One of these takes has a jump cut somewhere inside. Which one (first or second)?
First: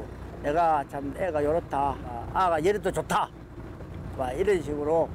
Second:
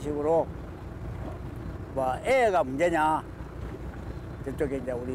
first